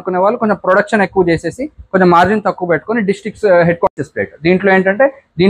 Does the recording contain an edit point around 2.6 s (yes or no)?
no